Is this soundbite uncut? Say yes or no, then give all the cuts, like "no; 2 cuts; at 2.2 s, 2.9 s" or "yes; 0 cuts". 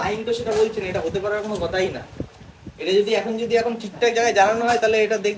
yes; 0 cuts